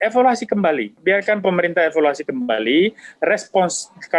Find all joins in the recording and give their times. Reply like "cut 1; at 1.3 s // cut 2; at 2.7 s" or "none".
cut 1; at 0.9 s